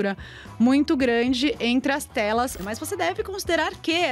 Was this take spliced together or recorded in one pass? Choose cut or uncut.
cut